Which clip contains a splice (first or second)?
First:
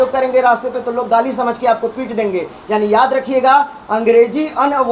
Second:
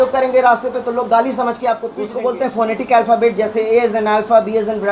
second